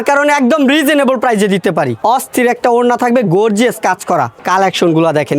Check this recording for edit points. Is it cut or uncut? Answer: cut